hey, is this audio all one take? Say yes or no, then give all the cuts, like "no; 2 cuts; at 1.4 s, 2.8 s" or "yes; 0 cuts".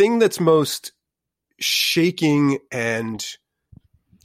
yes; 0 cuts